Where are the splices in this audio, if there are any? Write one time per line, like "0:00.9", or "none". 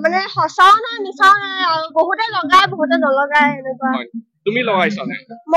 none